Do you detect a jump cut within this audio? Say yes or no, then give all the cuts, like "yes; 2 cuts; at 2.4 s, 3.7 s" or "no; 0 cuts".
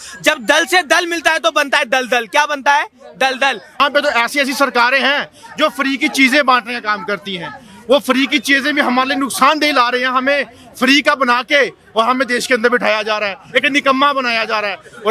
yes; 1 cut; at 3.8 s